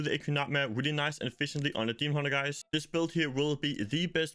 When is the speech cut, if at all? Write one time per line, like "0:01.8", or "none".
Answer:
0:02.6